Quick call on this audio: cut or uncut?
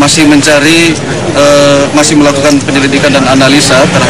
cut